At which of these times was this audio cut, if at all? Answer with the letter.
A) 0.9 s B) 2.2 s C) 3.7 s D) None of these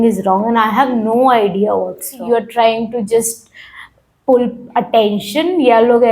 B